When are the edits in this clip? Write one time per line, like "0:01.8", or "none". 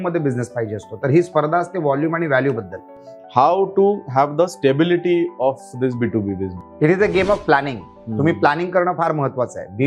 0:02.9
0:06.6

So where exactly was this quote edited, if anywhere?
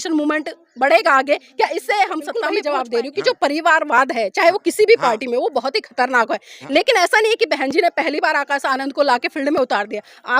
0:02.5

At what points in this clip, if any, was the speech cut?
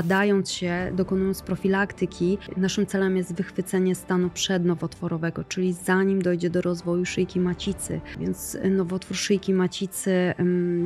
0:02.5
0:08.1

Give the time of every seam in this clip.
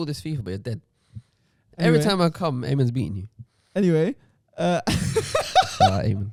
none

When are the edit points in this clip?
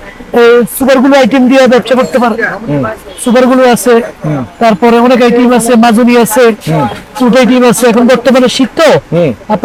none

